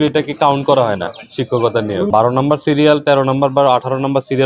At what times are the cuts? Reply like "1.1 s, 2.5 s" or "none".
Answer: 2.1 s

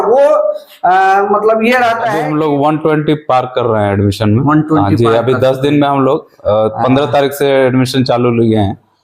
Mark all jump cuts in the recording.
2.2 s

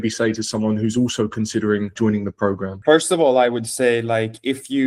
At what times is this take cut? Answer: 2.7 s

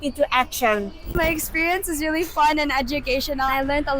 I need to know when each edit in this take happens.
1.1 s

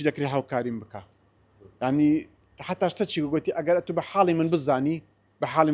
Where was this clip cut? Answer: none

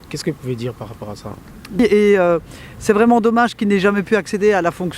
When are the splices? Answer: 1.8 s

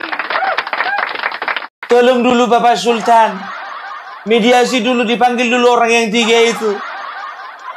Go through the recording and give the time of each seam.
1.7 s

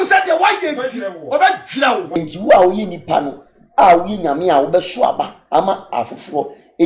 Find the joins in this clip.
2.2 s

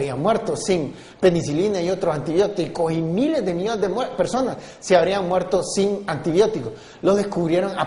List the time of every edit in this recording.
none

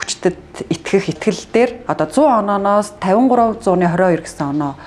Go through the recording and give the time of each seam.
1.2 s

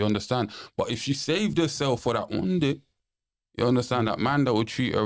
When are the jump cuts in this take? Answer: none

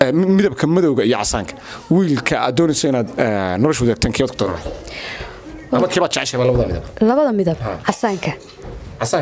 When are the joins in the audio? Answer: none

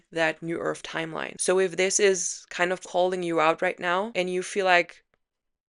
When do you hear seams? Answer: 1.3 s, 4.1 s

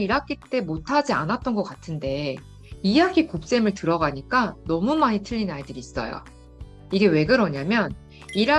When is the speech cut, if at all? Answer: none

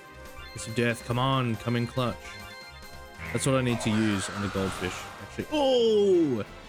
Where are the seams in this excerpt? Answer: none

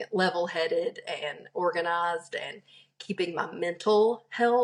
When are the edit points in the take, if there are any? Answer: none

